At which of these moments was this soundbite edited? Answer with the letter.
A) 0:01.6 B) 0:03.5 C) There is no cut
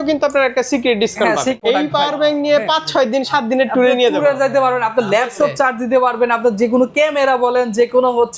A